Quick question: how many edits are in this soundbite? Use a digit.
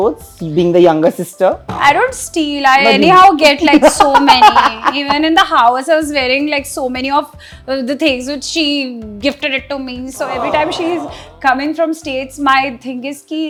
0